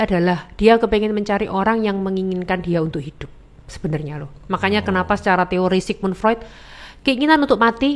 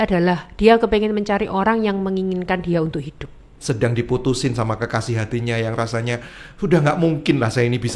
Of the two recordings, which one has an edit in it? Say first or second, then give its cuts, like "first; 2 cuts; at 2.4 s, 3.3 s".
second; 1 cut; at 3.5 s